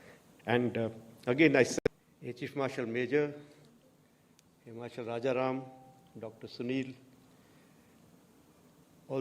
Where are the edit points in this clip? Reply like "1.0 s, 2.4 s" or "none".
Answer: 1.7 s